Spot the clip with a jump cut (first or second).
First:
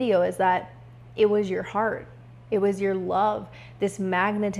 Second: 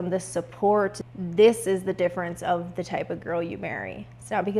second